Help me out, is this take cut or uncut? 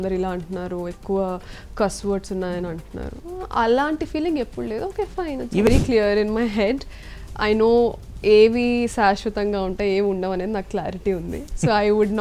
cut